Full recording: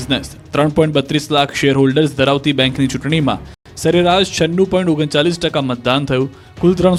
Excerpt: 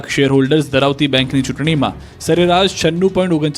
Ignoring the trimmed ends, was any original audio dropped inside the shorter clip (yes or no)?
yes